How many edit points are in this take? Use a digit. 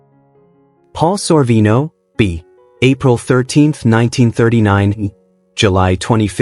1